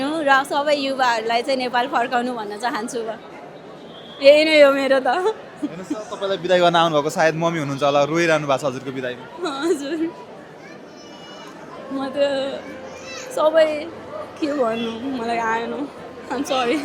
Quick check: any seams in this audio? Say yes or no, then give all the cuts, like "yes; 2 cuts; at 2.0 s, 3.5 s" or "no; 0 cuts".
no; 0 cuts